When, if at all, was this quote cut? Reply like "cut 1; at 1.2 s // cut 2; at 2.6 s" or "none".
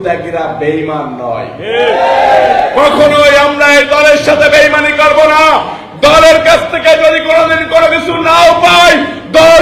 none